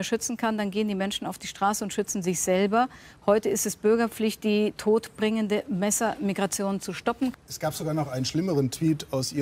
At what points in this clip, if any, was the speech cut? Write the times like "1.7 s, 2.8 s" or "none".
7.3 s